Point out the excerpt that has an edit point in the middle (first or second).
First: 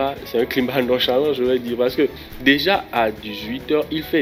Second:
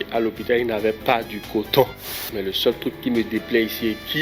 second